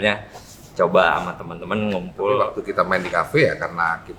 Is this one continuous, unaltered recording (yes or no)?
no